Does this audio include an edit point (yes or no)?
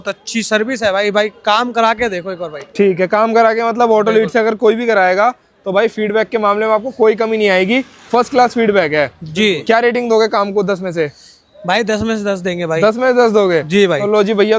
no